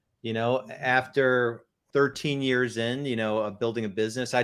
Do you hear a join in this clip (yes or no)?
yes